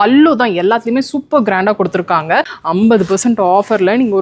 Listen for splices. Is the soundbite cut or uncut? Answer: cut